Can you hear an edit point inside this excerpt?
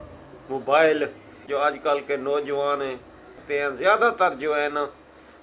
yes; 2 cuts; at 1.5 s, 3.4 s

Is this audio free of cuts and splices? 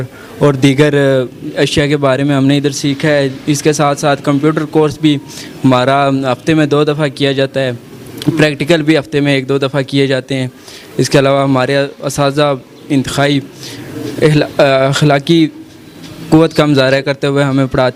yes; 0 cuts

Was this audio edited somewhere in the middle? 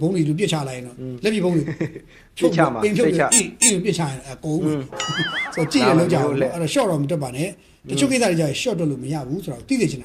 no; 0 cuts

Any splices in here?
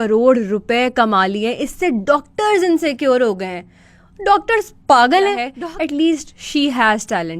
yes; 1 cut; at 5.5 s

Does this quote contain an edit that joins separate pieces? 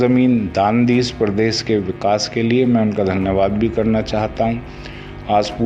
no; 0 cuts

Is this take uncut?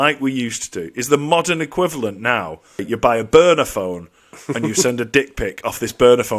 no; 1 cut; at 2.8 s

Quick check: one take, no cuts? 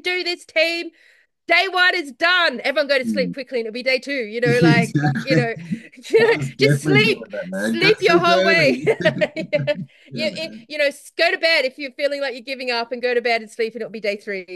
yes; 0 cuts

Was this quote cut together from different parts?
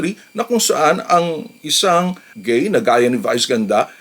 yes; 1 cut; at 2.3 s

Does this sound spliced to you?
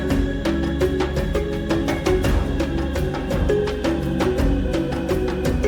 no; 0 cuts

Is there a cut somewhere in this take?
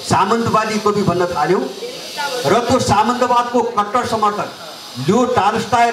no; 0 cuts

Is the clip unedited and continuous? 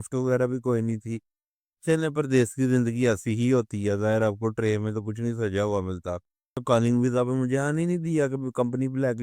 no; 1 cut; at 6.6 s

